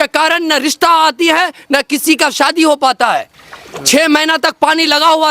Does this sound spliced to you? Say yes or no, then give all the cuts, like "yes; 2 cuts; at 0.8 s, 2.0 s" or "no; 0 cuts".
no; 0 cuts